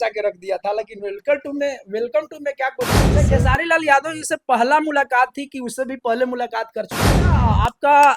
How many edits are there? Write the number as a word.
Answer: two